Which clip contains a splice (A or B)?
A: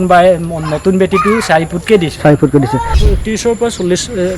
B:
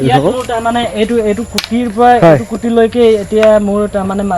A